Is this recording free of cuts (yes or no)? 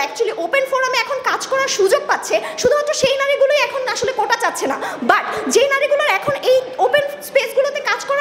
yes